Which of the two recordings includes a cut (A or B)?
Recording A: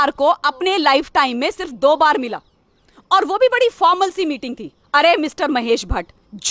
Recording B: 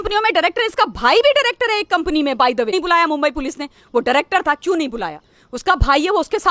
B